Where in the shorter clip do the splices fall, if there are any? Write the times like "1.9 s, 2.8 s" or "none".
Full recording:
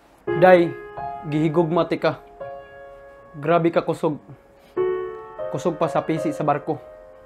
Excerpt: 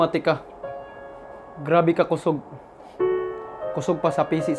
none